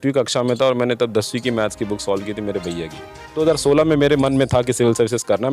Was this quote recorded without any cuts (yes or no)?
no